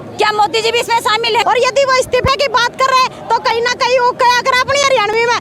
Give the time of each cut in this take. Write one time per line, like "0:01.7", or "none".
0:01.4